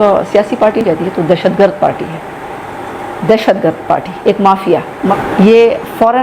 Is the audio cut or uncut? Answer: cut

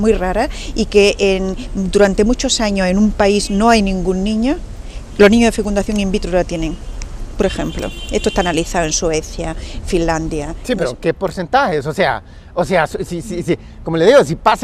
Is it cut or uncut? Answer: cut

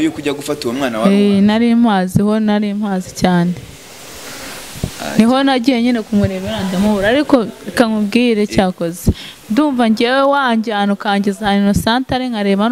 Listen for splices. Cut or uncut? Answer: uncut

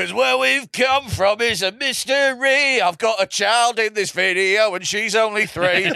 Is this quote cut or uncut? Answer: uncut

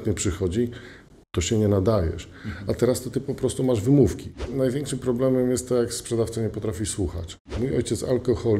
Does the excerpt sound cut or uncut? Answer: cut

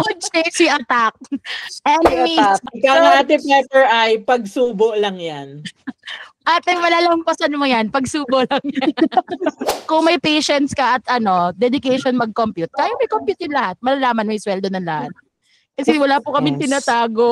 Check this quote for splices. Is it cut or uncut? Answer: cut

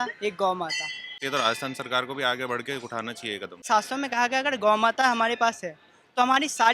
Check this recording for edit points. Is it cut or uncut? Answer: cut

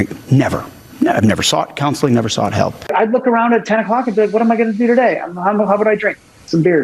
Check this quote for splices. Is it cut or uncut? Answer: cut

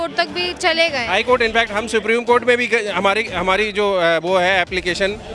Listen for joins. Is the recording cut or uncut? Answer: uncut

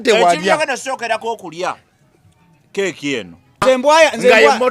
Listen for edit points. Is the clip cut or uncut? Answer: cut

